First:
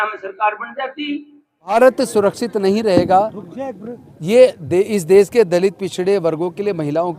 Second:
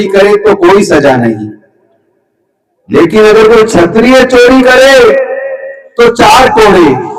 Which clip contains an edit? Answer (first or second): first